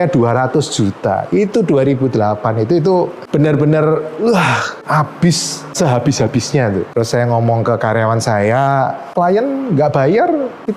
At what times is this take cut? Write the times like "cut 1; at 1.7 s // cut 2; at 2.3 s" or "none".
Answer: none